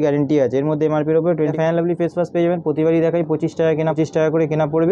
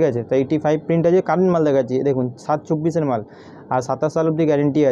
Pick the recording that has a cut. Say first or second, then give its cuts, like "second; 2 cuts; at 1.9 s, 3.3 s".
first; 2 cuts; at 1.5 s, 4.0 s